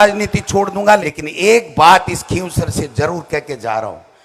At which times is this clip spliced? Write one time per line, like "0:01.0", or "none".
0:01.1